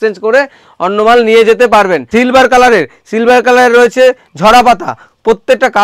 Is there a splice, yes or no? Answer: yes